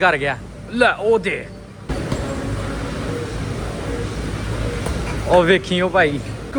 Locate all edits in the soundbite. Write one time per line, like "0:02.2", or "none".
none